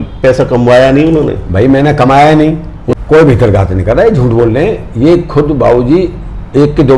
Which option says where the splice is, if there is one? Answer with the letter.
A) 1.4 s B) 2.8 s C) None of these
B